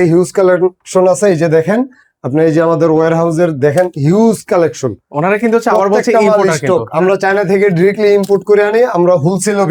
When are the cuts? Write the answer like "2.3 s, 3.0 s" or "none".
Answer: none